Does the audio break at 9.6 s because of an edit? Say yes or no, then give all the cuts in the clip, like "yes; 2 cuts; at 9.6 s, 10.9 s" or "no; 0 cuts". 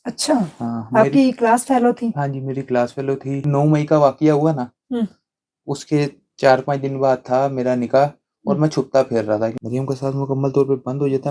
yes; 2 cuts; at 3.5 s, 9.6 s